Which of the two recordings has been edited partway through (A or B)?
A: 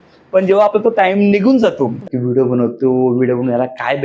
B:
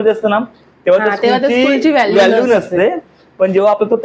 A